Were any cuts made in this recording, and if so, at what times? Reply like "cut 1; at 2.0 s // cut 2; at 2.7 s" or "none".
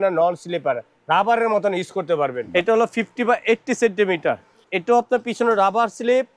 cut 1; at 0.9 s // cut 2; at 2.4 s // cut 3; at 4.6 s